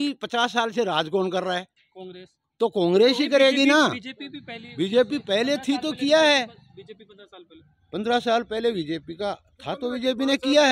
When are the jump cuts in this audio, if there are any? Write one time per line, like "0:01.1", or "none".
none